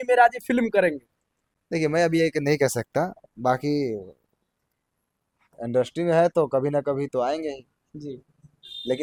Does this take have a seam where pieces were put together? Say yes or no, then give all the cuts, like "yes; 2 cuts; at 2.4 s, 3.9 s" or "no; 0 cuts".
no; 0 cuts